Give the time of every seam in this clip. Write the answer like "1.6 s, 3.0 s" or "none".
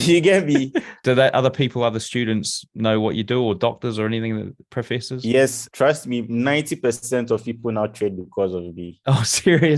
1.0 s, 5.6 s